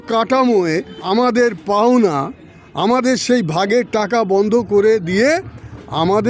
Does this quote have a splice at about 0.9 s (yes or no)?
yes